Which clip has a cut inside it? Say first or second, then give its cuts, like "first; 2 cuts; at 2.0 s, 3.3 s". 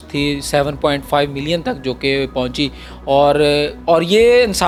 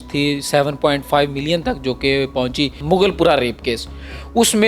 second; 1 cut; at 2.8 s